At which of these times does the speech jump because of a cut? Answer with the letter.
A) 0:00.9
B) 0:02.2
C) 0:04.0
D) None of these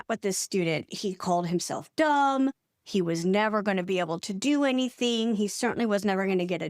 A